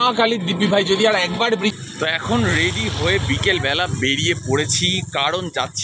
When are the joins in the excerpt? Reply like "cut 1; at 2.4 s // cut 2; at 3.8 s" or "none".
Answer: cut 1; at 1.8 s